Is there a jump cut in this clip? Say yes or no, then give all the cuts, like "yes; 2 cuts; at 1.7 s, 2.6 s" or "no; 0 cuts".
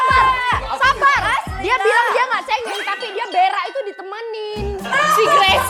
no; 0 cuts